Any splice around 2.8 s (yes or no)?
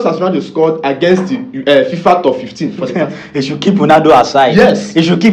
yes